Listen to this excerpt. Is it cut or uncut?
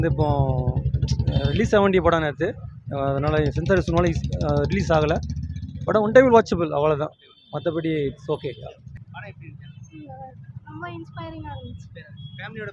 cut